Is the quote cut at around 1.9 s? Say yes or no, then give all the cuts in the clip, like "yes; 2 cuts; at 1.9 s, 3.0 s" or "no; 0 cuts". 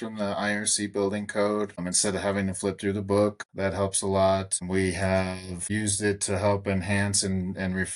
yes; 4 cuts; at 1.9 s, 3.5 s, 4.7 s, 5.6 s